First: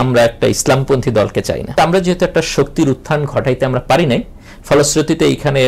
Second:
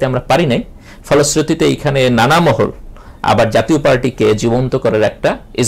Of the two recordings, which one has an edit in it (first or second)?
first